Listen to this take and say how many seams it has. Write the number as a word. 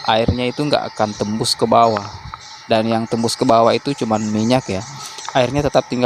zero